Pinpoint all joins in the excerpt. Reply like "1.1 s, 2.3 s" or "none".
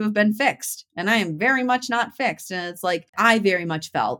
3.1 s